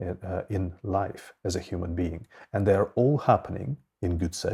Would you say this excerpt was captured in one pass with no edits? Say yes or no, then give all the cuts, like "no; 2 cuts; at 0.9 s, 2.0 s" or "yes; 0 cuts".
yes; 0 cuts